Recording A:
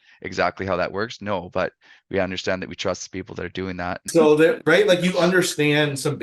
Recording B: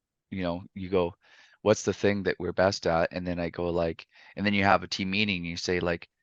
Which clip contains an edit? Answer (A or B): A